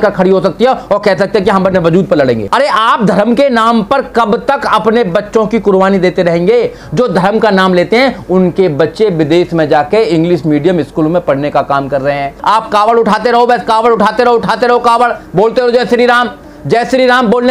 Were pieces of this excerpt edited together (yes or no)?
yes